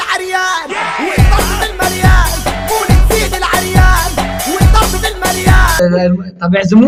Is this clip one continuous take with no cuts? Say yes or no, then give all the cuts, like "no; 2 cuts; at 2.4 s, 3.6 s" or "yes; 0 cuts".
yes; 0 cuts